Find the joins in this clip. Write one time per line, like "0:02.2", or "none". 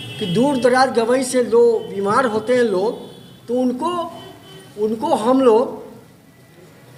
none